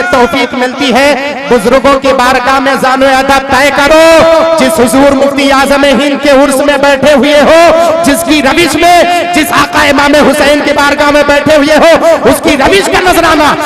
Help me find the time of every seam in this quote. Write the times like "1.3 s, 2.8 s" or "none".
none